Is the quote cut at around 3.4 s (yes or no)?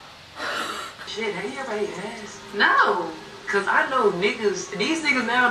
no